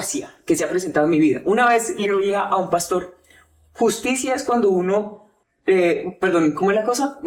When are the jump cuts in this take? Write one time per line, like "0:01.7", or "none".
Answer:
none